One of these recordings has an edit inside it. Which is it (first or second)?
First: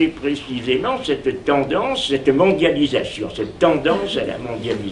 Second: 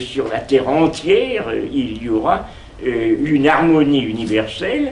first